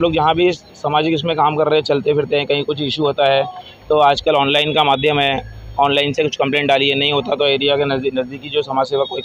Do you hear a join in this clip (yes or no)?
no